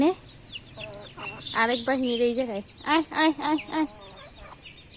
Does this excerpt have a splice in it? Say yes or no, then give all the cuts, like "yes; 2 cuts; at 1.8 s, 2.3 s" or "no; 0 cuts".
no; 0 cuts